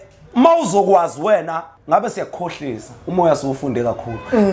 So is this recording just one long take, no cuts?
no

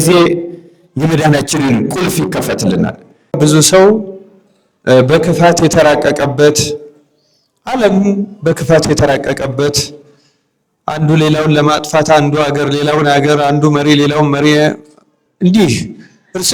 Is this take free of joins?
no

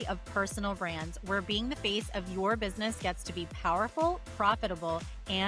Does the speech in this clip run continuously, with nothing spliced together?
yes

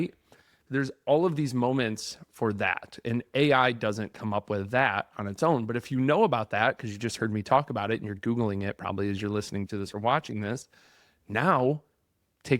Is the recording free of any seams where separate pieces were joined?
yes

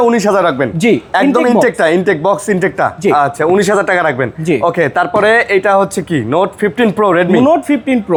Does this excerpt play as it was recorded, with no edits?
yes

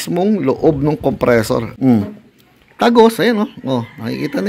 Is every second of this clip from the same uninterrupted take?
no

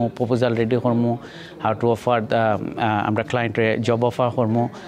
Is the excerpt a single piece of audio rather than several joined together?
yes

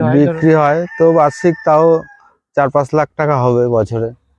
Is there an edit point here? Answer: no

